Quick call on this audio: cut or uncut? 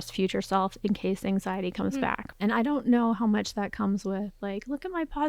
cut